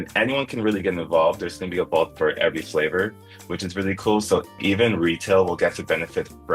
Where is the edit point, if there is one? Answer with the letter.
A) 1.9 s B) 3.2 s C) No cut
C